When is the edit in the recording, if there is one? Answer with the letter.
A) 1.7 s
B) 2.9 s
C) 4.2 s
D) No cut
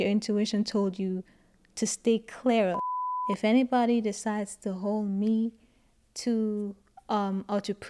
B